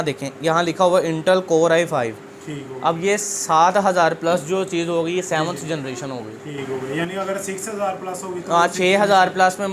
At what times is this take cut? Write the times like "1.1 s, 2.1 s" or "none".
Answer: none